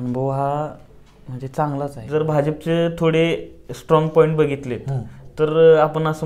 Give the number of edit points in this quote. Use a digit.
1